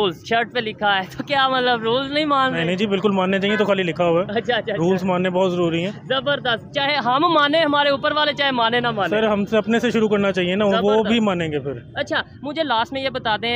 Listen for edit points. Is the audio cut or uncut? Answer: uncut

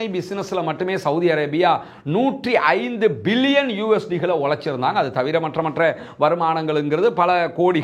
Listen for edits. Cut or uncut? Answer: uncut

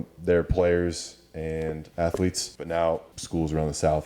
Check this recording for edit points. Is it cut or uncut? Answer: cut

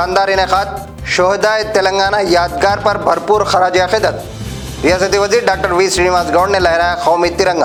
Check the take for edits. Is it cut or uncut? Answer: uncut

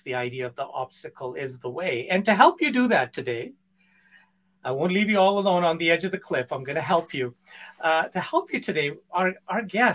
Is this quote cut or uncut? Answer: uncut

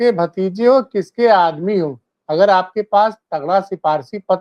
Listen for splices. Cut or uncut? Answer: uncut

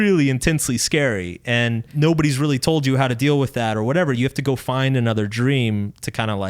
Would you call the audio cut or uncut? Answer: cut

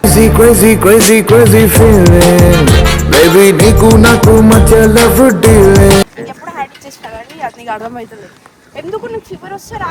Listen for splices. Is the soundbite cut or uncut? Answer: uncut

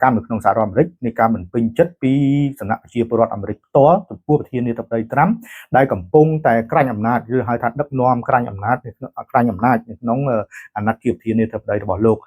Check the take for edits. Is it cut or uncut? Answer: uncut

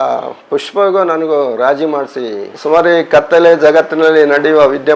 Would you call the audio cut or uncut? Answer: cut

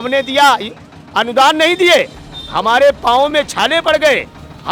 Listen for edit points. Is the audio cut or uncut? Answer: uncut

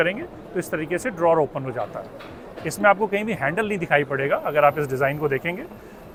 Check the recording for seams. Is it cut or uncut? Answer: uncut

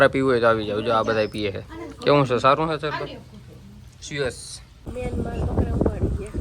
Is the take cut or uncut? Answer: cut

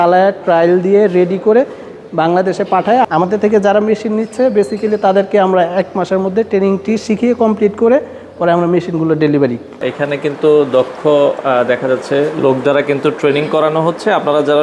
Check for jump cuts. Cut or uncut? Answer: cut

